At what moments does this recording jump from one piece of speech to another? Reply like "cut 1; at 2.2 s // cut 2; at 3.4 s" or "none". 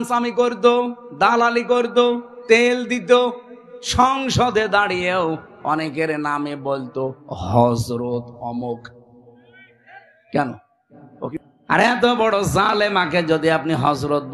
cut 1; at 11.3 s